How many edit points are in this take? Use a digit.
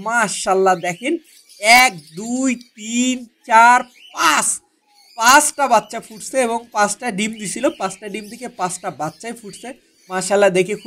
0